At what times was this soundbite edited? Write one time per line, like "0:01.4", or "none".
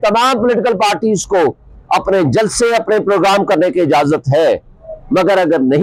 none